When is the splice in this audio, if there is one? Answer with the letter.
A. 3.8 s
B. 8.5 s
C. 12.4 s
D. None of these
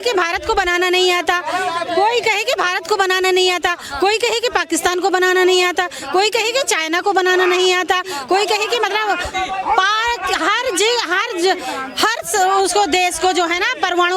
D